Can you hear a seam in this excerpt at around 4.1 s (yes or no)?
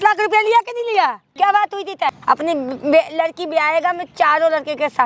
no